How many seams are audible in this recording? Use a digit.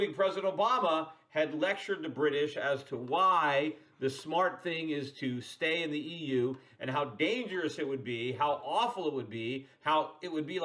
1